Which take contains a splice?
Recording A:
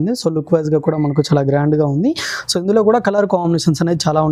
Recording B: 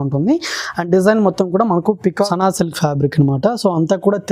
B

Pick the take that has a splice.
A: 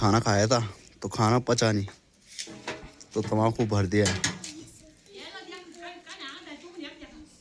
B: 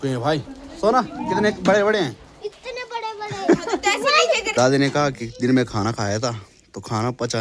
B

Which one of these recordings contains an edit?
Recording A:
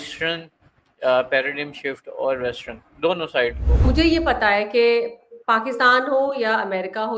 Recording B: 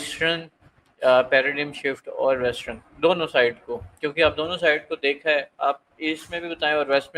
A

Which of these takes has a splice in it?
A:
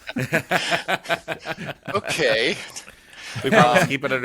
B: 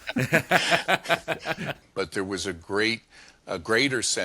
B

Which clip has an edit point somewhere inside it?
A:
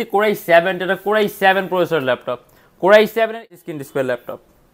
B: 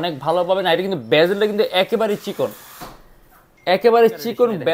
A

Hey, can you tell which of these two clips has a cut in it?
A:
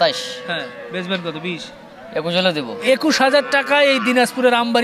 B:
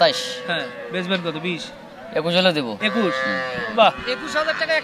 A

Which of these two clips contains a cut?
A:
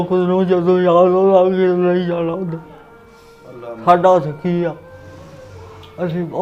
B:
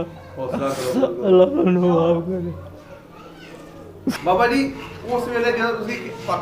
B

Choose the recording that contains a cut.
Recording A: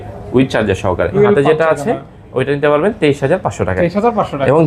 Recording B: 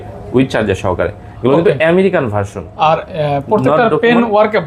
A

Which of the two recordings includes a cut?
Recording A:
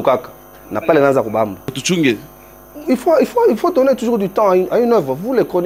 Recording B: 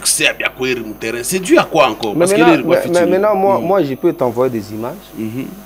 A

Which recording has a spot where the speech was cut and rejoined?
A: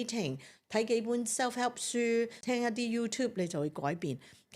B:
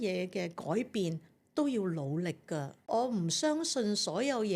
A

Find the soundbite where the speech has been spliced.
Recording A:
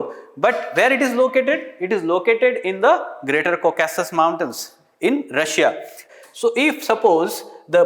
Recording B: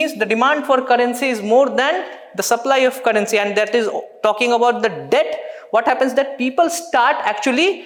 A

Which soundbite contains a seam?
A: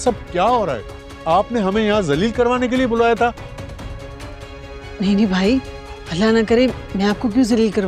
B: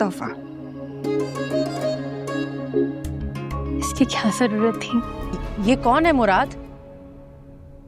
B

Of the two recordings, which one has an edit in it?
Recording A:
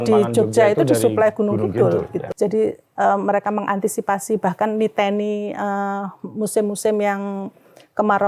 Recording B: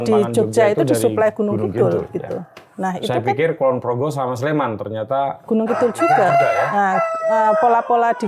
A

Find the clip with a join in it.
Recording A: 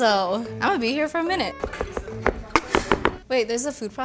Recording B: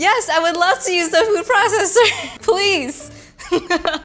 A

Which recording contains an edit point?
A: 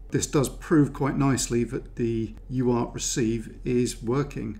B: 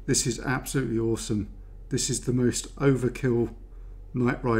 A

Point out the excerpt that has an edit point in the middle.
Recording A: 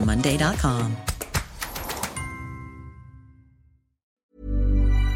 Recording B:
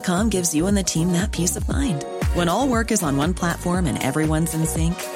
A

